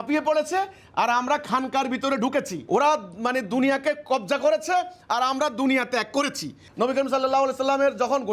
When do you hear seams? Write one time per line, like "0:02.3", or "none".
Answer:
0:02.6
0:06.6